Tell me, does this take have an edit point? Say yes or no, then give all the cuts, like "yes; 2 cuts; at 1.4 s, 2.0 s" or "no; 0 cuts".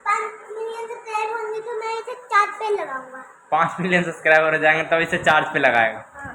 no; 0 cuts